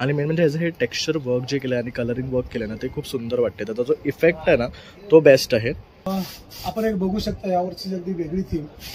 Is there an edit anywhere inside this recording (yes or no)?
yes